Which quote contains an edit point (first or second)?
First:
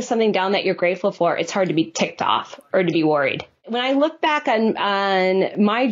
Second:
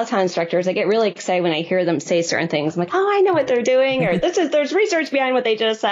first